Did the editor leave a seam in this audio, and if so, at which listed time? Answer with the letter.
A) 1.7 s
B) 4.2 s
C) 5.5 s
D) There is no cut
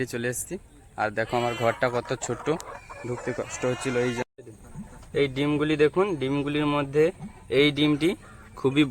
B